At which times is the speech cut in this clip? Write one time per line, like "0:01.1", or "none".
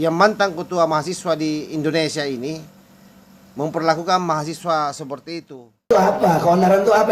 0:05.9